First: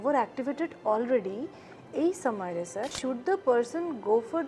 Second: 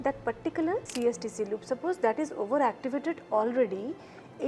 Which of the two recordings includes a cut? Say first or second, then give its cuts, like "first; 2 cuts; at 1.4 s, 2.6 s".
first; 1 cut; at 2.9 s